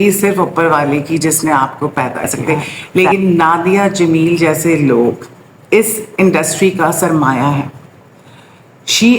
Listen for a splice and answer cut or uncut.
cut